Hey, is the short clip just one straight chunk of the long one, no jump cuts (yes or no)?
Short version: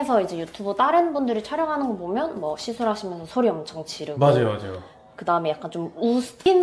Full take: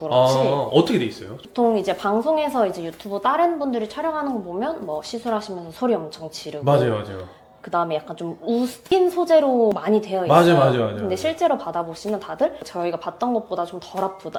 yes